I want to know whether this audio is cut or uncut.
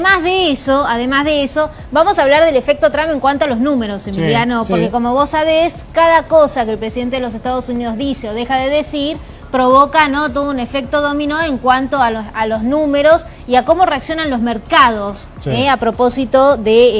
cut